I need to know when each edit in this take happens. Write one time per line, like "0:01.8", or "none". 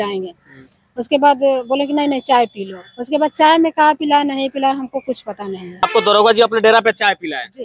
0:05.9